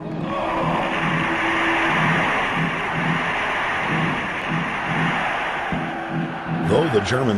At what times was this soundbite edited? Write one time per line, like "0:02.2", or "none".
0:06.0